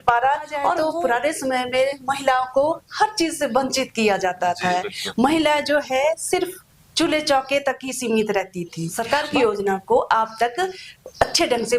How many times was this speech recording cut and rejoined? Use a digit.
2